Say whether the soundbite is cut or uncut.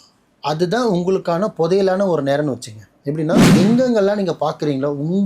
cut